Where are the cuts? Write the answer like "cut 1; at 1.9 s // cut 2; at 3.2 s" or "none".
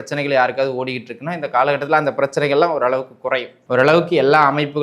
cut 1; at 3.5 s